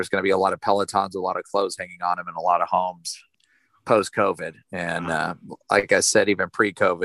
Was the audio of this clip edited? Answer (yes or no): yes